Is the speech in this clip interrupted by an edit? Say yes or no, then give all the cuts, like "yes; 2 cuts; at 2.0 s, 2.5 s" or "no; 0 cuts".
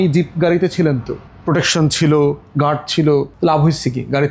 yes; 1 cut; at 3.3 s